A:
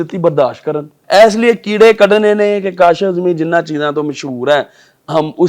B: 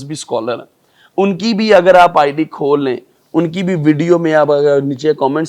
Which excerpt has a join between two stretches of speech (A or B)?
A